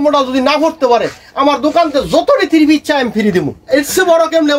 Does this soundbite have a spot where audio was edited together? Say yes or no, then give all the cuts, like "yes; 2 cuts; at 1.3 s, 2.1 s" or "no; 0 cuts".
yes; 1 cut; at 3.6 s